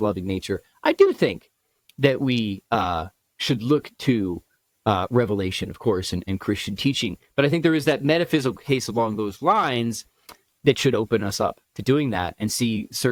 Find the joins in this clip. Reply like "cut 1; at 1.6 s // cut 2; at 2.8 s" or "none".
none

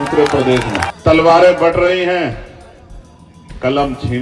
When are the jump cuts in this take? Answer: cut 1; at 0.9 s

